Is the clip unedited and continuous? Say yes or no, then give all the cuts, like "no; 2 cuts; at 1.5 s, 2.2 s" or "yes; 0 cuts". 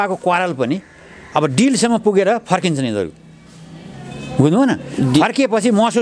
yes; 0 cuts